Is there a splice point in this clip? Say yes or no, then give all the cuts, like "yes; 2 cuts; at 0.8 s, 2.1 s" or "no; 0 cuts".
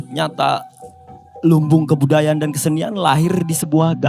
no; 0 cuts